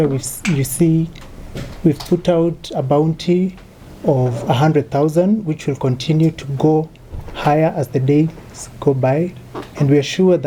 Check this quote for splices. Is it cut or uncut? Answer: uncut